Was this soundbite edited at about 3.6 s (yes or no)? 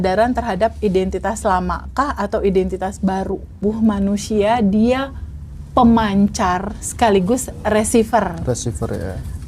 yes